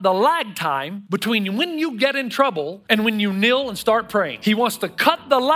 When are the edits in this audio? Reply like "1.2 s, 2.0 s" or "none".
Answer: 0.9 s, 2.8 s, 4.3 s